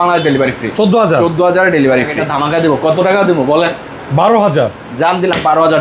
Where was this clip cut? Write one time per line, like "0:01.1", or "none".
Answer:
0:02.1